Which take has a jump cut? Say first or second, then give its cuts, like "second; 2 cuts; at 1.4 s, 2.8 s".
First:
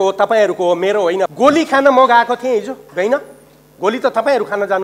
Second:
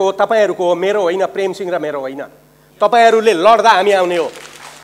first; 1 cut; at 1.3 s